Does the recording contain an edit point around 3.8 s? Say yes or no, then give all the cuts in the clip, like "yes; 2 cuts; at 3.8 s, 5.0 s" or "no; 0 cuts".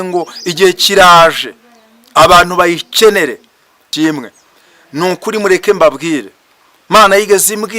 yes; 1 cut; at 3.8 s